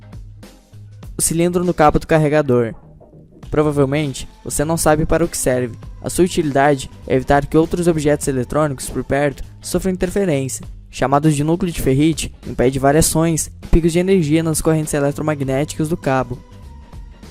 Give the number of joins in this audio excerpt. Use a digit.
1